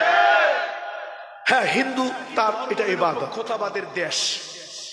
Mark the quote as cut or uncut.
cut